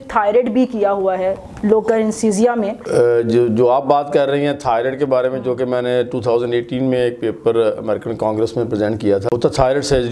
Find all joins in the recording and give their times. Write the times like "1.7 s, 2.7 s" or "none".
2.8 s, 9.3 s